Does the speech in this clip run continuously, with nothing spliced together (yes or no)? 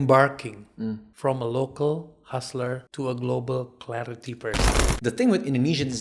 no